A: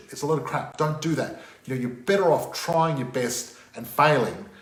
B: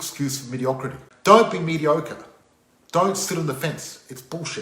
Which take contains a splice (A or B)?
B